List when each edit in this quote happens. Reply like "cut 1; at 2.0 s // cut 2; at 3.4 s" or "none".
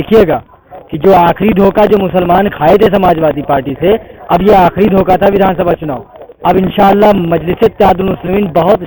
none